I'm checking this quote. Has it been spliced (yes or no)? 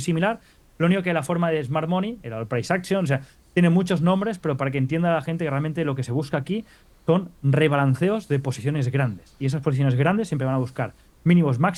no